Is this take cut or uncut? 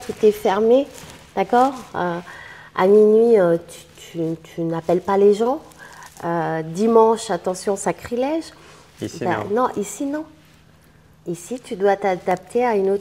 uncut